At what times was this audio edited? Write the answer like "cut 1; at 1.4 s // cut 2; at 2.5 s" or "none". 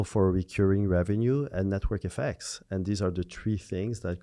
none